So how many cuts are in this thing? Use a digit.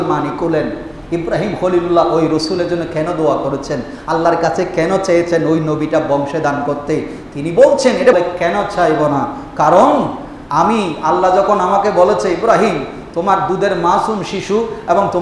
1